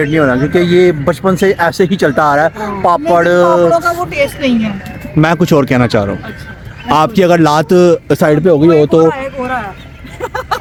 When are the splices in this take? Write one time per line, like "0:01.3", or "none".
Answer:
none